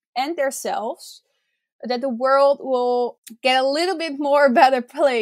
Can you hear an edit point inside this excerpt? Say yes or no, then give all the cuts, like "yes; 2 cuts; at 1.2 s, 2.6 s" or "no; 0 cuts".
yes; 1 cut; at 3.1 s